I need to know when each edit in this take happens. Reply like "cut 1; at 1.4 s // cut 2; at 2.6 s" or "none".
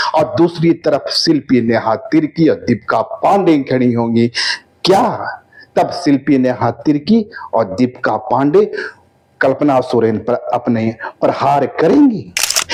none